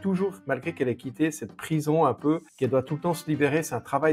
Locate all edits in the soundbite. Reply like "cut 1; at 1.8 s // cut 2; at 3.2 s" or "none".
cut 1; at 2.5 s